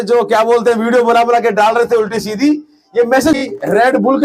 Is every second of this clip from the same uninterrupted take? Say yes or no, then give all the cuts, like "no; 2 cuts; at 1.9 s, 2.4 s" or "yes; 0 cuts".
no; 1 cut; at 3.3 s